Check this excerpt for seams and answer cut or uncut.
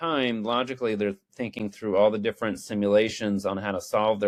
uncut